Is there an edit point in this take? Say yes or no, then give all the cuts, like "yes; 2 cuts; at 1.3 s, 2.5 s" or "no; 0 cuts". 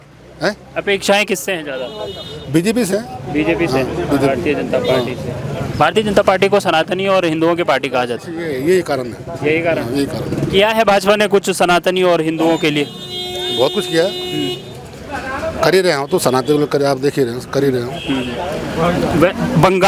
no; 0 cuts